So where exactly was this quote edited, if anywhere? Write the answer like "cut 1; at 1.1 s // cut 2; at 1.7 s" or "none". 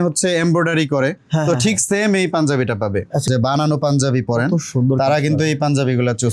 cut 1; at 3.2 s

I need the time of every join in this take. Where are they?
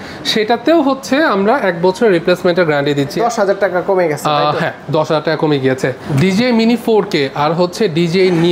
cut 1; at 3.2 s // cut 2; at 6.1 s

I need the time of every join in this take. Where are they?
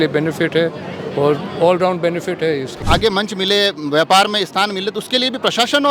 cut 1; at 2.7 s

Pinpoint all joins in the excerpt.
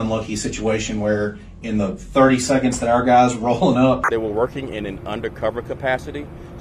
cut 1; at 4.0 s

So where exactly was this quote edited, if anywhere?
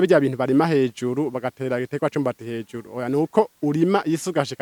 none

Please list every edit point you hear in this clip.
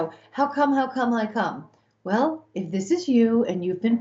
none

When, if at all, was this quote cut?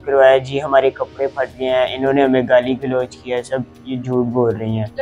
none

